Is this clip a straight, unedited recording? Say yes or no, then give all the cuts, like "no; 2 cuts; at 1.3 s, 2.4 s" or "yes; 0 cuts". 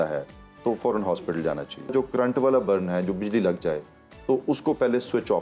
no; 1 cut; at 1.9 s